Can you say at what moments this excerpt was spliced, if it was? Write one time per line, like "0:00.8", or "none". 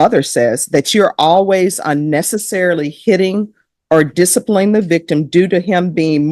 none